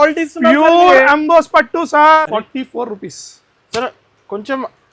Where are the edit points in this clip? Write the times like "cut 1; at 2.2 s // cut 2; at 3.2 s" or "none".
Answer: cut 1; at 2.2 s